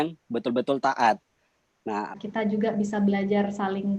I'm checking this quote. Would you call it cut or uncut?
cut